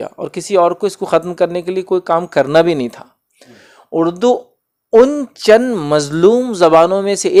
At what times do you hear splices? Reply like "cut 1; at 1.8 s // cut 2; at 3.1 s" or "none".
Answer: none